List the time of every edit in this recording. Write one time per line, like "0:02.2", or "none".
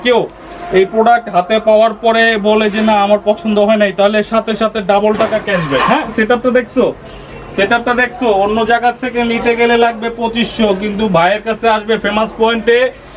0:06.1